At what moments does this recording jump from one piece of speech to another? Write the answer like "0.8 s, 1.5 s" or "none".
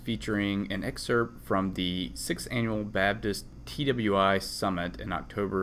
3.5 s